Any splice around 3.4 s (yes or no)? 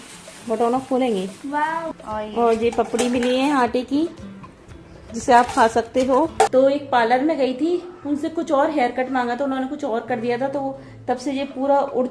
no